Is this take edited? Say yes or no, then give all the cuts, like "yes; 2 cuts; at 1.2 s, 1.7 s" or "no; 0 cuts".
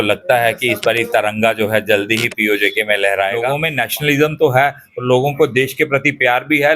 yes; 1 cut; at 3.7 s